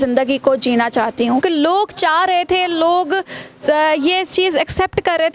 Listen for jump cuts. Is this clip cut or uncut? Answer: cut